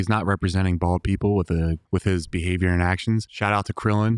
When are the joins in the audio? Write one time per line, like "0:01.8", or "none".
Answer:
0:01.8
0:03.3

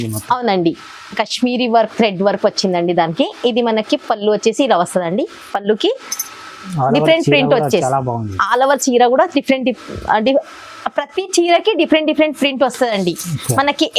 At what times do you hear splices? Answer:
none

